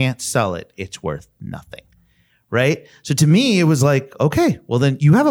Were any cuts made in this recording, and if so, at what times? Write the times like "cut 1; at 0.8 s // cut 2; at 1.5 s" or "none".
none